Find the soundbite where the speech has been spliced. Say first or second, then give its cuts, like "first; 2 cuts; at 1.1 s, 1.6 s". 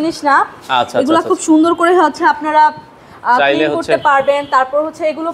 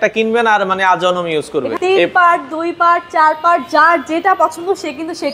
second; 1 cut; at 1.7 s